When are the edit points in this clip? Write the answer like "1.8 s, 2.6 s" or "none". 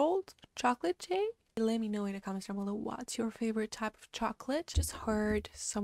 1.4 s, 4.7 s